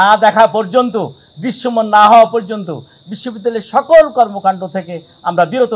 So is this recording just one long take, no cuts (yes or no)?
yes